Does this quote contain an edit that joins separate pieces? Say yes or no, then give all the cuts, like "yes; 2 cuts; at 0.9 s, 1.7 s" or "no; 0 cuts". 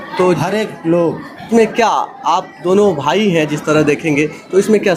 yes; 1 cut; at 1.3 s